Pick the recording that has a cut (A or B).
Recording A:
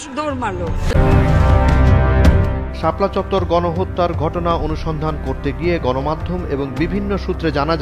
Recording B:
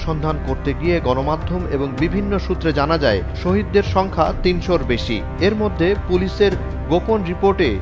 A